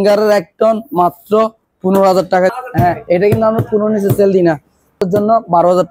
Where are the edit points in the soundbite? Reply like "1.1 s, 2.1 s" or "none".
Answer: 2.5 s, 5.0 s